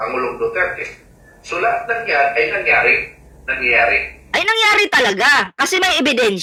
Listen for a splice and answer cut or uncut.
uncut